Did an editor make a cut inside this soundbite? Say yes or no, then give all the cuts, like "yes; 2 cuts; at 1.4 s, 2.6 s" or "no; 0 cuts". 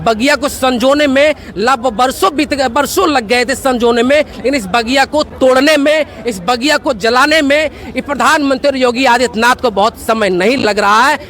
no; 0 cuts